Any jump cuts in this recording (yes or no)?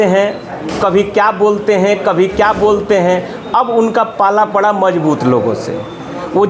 no